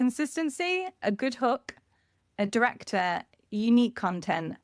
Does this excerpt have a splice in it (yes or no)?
no